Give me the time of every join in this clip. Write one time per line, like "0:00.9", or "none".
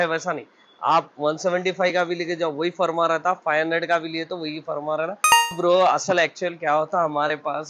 0:05.5